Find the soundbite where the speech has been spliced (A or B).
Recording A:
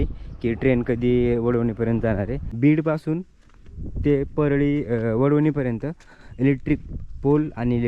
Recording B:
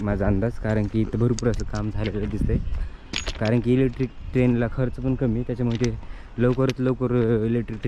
A